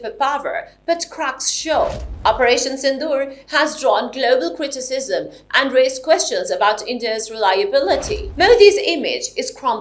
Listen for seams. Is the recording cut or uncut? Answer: cut